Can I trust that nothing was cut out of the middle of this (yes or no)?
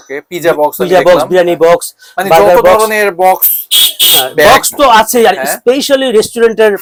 yes